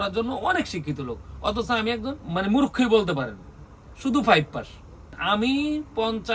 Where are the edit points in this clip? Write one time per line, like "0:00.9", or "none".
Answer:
0:02.2
0:05.1